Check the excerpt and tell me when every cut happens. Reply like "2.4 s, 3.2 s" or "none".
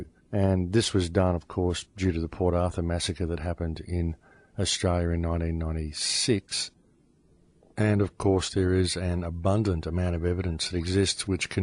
none